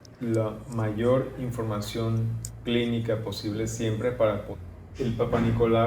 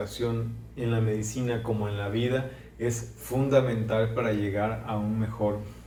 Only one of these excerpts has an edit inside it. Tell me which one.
first; 1 cut; at 4.5 s

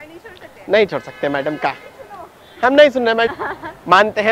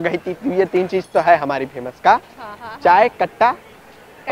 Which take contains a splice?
first; 1 cut; at 3.3 s

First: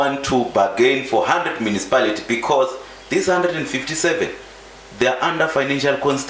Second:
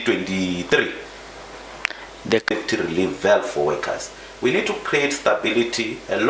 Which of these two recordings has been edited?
second; 1 cut; at 2.5 s

